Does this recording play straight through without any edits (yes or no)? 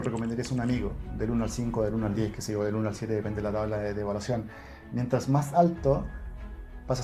yes